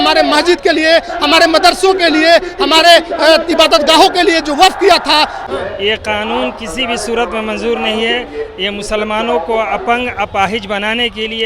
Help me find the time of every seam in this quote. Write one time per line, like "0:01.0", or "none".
0:05.4